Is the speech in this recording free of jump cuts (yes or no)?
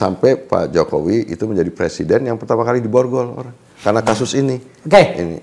yes